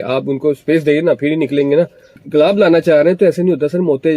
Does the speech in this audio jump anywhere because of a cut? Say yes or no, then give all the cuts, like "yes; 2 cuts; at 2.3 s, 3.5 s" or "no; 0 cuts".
yes; 1 cut; at 2.2 s